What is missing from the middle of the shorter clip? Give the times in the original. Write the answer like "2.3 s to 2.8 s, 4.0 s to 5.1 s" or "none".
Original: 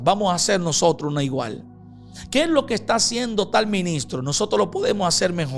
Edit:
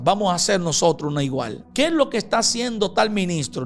1.6 s to 2.2 s